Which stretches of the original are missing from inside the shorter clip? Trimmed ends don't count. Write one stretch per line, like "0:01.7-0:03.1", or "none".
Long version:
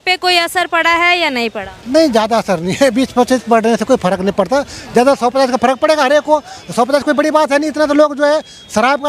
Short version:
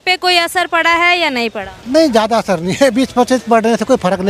none